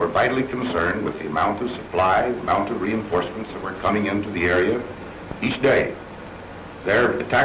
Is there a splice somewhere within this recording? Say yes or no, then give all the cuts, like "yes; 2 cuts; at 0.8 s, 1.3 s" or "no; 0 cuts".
yes; 1 cut; at 5.7 s